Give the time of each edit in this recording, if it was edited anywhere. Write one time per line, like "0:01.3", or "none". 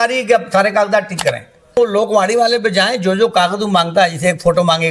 0:01.8